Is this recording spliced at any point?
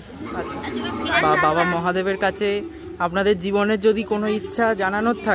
yes; 1 cut; at 1.2 s

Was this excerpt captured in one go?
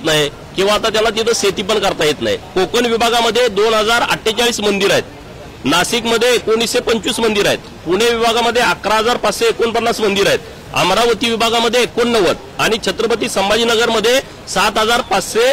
no; 1 cut; at 2.4 s

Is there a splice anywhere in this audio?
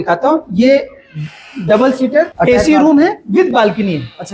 yes; 1 cut; at 2.3 s

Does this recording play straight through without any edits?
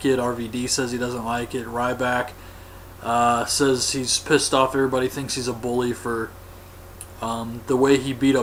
yes; 0 cuts

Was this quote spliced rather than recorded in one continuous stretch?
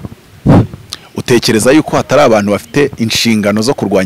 no; 0 cuts

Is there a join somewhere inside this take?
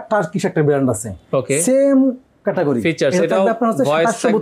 no; 0 cuts

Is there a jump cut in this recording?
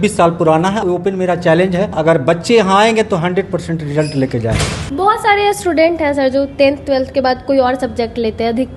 yes; 3 cuts; at 0.8 s, 2.0 s, 4.8 s

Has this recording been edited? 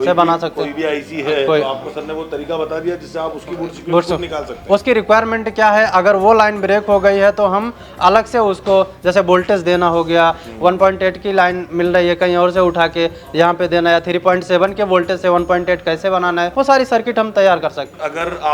no; 0 cuts

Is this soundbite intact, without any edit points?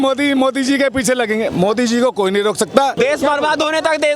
no; 1 cut; at 2.9 s

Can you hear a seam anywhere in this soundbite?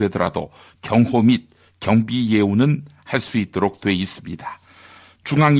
no; 0 cuts

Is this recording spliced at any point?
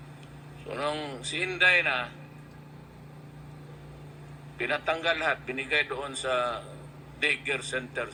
no; 0 cuts

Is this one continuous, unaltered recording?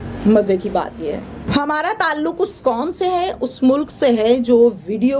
no; 1 cut; at 1.5 s

